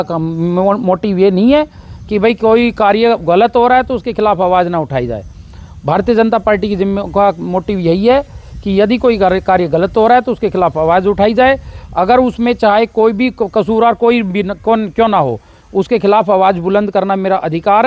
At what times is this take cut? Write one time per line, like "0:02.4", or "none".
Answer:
none